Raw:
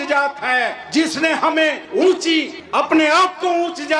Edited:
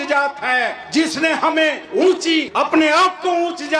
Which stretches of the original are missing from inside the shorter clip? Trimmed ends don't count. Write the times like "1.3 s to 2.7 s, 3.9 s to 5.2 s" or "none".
2.5 s to 2.7 s